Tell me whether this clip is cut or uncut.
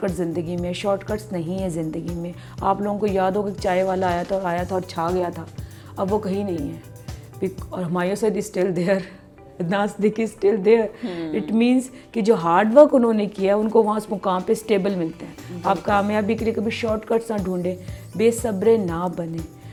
uncut